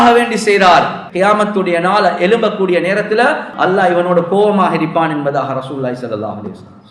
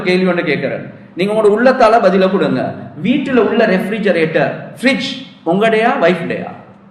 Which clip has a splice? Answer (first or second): first